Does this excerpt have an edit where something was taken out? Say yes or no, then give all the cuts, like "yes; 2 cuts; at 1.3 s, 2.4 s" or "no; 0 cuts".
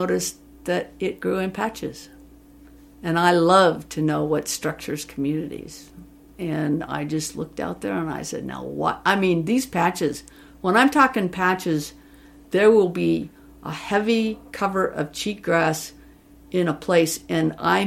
no; 0 cuts